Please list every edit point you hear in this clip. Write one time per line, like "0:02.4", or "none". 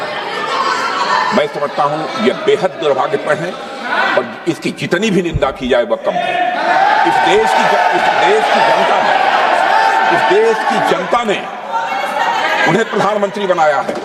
none